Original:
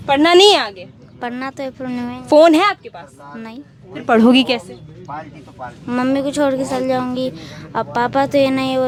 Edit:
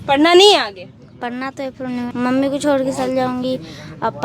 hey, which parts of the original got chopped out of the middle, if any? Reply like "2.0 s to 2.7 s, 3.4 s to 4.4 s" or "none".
2.1 s to 5.8 s